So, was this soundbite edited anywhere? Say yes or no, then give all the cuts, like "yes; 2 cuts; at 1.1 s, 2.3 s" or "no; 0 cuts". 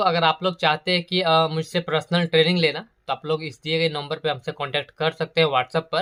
no; 0 cuts